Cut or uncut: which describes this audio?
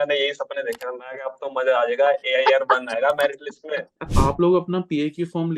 cut